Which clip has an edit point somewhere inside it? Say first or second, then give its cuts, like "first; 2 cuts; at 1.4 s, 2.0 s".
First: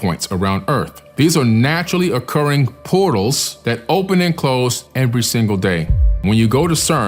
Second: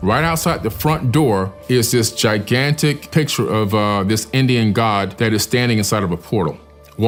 first; 3 cuts; at 1.0 s, 3.5 s, 6.2 s